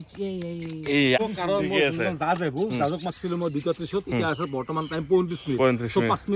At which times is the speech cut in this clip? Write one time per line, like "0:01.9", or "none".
0:01.2